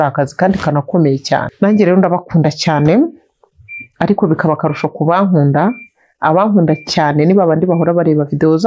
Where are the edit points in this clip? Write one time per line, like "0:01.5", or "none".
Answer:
0:01.5